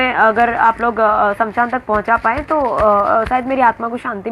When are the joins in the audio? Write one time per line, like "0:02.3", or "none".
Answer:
none